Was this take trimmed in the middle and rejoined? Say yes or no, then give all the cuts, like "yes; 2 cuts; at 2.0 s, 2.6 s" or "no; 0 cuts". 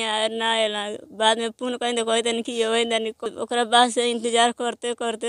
yes; 1 cut; at 3.3 s